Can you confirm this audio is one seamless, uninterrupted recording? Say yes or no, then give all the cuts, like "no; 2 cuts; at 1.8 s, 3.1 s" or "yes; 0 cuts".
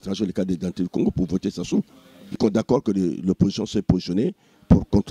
no; 1 cut; at 2.3 s